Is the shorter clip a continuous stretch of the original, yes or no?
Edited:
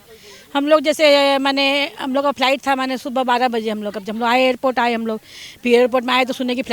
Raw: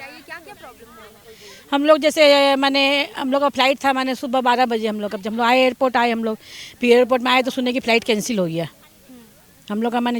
yes